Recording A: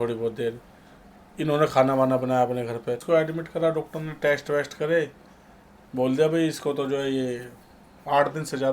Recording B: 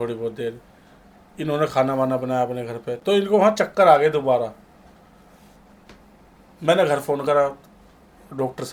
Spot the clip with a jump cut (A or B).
A